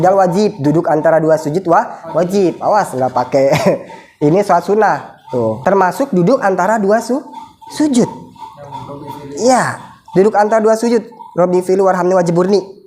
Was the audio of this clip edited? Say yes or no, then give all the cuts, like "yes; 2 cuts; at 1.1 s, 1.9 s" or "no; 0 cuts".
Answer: yes; 1 cut; at 5.6 s